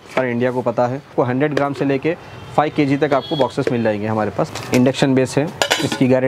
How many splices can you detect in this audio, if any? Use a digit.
2